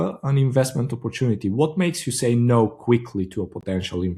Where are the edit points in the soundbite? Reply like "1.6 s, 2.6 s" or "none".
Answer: none